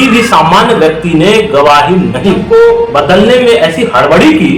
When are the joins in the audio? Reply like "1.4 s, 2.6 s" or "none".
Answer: 2.4 s